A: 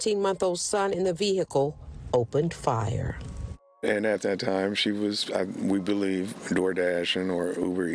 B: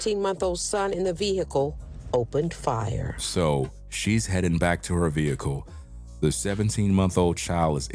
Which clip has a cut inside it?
A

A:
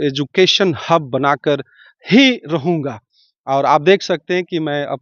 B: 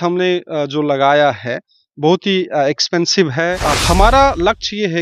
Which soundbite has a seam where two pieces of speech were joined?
B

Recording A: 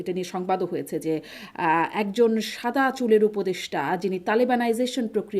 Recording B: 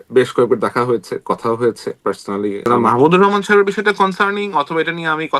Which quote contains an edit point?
B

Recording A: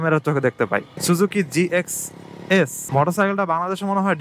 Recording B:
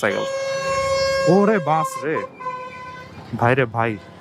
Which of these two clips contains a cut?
A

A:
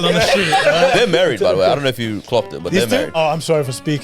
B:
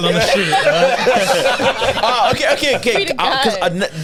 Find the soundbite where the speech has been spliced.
A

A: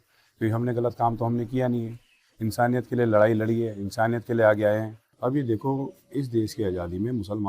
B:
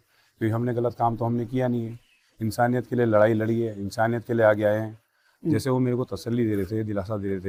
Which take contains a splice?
A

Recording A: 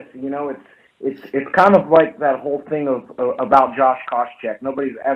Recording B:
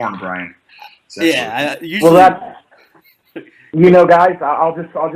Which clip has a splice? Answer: A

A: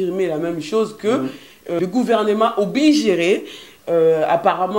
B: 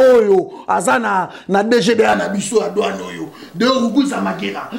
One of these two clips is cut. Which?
A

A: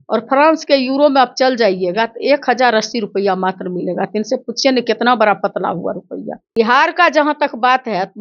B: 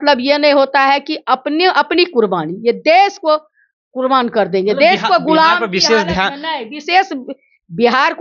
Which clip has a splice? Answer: A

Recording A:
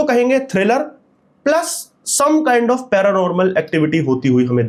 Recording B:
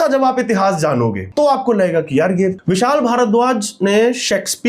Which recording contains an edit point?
B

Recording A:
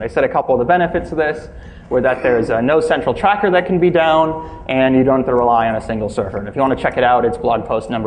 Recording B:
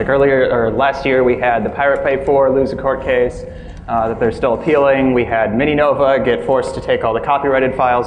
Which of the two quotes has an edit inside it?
A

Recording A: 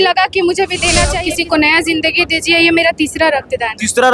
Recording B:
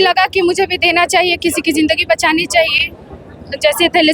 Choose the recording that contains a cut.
A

